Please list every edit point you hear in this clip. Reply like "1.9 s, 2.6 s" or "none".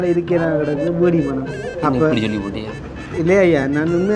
1.7 s

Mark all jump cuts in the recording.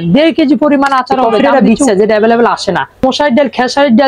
1.3 s, 3.0 s

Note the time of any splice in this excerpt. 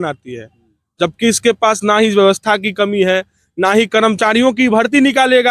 none

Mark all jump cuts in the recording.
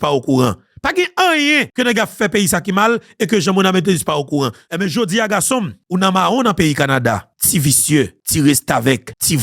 1.7 s, 4.6 s

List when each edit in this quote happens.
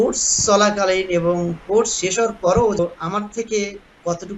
2.8 s

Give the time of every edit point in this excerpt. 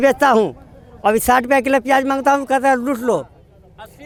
none

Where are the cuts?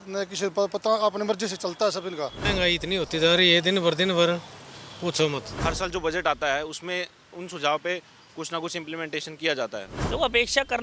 2.4 s, 5.5 s, 9.9 s

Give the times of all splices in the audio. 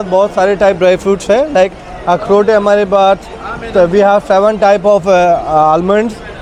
none

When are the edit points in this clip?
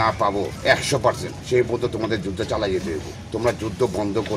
1.0 s, 3.1 s

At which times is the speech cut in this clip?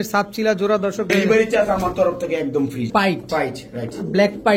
1.1 s, 2.9 s

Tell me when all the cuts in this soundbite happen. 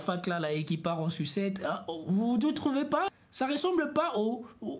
3.1 s

